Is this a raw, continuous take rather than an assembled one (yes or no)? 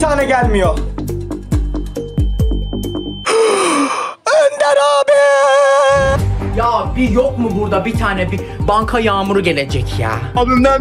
no